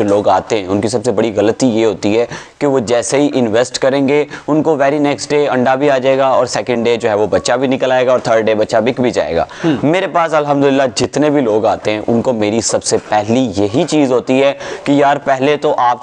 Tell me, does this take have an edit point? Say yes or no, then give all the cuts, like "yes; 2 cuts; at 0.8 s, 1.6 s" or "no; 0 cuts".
no; 0 cuts